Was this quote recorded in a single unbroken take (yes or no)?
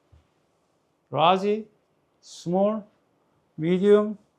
yes